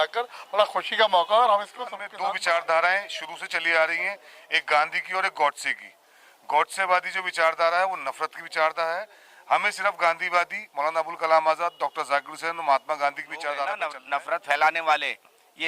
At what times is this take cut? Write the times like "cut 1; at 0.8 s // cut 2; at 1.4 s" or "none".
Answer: cut 1; at 2.0 s // cut 2; at 13.9 s